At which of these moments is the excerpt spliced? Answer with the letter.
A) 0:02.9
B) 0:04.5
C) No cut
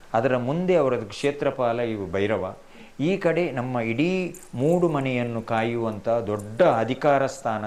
C